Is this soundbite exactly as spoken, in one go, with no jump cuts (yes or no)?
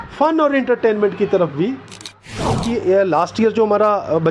no